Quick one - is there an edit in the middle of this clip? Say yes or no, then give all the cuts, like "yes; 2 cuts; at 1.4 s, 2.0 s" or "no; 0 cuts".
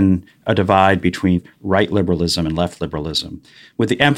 yes; 1 cut; at 1.4 s